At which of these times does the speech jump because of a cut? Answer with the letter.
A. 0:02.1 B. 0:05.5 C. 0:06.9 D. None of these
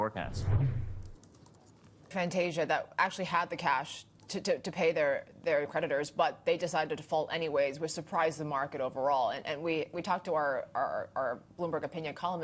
A